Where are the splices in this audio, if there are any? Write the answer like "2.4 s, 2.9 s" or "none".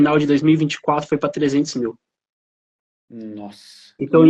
none